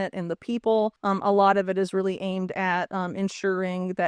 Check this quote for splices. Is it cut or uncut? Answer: cut